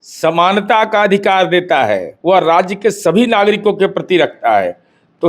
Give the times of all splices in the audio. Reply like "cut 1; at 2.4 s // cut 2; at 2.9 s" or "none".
cut 1; at 2.1 s